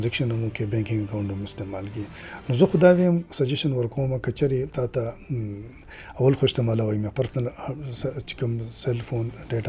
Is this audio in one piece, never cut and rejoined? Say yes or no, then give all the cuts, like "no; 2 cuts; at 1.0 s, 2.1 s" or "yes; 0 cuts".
yes; 0 cuts